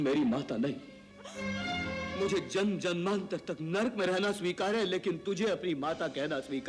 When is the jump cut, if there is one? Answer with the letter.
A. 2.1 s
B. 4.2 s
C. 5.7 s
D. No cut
A